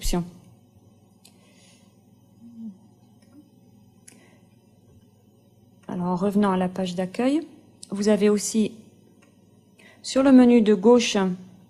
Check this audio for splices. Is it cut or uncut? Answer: uncut